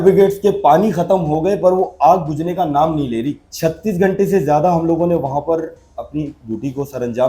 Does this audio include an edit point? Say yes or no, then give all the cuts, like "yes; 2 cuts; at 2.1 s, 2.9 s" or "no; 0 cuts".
yes; 1 cut; at 3.4 s